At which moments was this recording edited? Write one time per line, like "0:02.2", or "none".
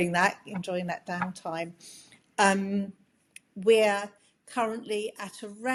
none